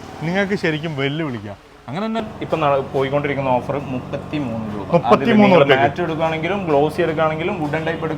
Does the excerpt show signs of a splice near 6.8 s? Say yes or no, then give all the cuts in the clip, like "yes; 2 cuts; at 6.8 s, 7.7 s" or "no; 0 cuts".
no; 1 cut; at 2.2 s